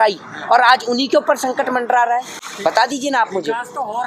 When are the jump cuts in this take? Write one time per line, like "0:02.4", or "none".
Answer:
none